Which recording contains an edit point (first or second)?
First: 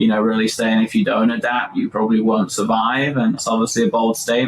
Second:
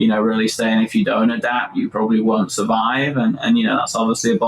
first